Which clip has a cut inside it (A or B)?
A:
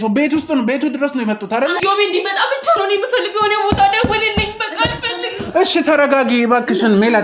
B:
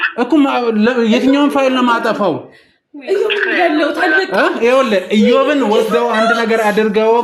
A